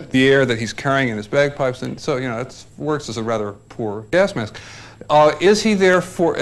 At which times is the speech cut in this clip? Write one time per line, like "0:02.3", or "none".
0:04.2